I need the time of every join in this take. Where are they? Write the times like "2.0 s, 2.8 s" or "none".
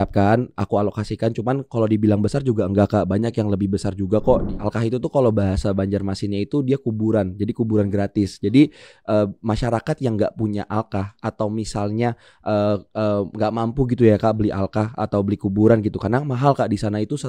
4.5 s